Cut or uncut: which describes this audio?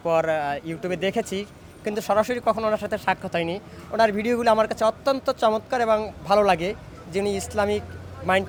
uncut